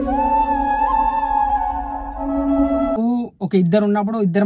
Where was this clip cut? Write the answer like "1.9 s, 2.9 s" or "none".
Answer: 3.0 s